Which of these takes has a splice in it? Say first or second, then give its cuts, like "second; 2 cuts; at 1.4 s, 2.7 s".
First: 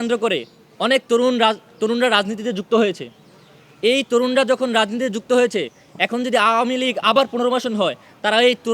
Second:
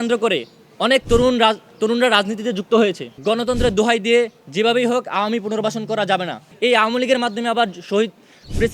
second; 2 cuts; at 3.1 s, 6.5 s